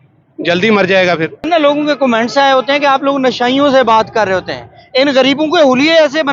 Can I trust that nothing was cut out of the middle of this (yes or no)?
no